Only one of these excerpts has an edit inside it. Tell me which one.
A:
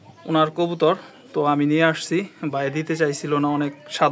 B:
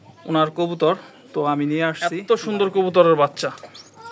B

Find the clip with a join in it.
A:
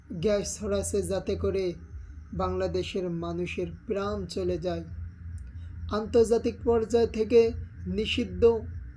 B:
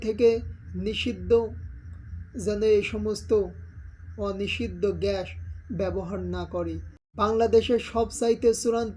B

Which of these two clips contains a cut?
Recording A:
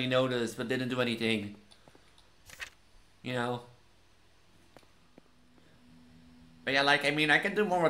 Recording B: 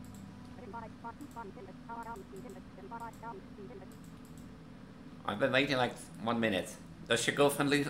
A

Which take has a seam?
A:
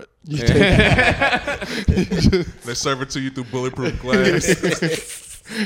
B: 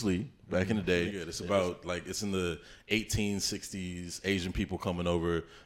B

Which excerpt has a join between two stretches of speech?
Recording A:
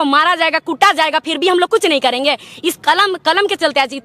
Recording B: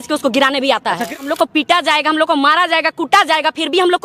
B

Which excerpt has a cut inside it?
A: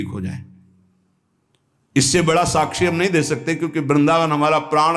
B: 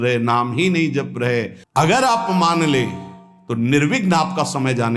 B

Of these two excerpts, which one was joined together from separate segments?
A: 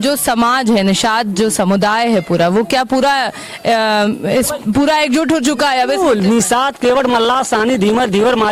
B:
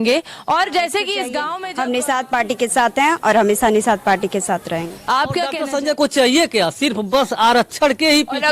B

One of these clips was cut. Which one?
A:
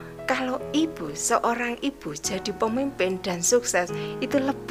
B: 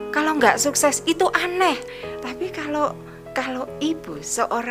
B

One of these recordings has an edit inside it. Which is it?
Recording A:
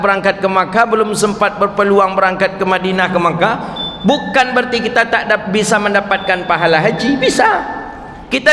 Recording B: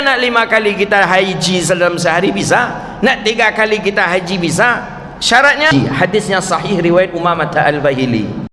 B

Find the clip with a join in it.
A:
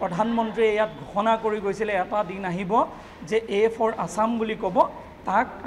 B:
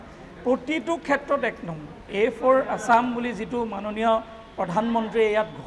B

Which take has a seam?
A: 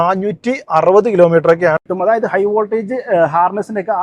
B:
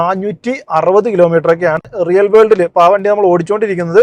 A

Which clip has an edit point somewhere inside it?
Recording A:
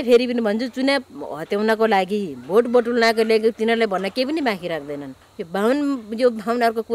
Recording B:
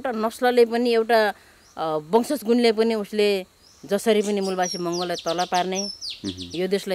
A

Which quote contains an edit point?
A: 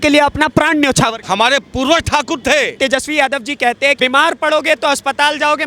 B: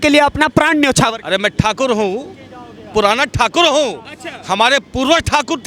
A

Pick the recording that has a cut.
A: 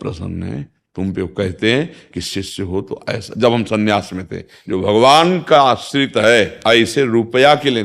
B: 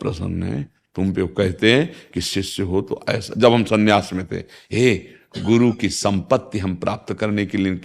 A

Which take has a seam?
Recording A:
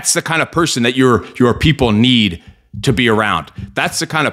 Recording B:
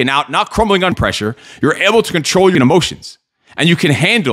B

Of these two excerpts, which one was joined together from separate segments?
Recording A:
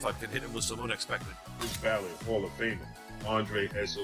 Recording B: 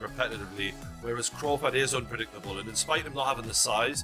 A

